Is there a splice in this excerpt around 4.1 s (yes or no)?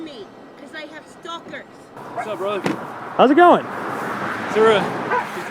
no